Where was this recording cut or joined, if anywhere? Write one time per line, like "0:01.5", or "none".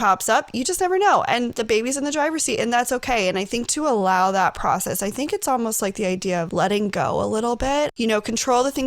0:06.5
0:07.9